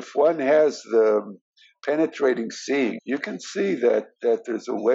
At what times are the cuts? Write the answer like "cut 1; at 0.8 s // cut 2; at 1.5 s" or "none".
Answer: cut 1; at 3.0 s